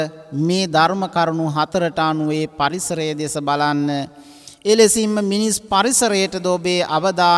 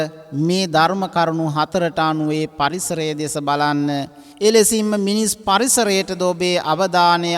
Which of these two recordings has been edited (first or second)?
second